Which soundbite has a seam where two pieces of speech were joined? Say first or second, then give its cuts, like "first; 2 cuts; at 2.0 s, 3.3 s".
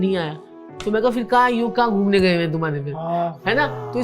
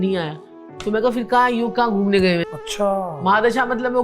second; 1 cut; at 2.5 s